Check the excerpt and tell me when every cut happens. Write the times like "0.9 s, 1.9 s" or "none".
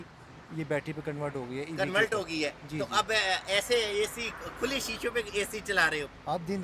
none